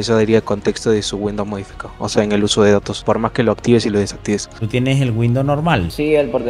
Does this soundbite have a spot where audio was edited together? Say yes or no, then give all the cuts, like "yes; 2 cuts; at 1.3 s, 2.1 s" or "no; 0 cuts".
yes; 1 cut; at 4.6 s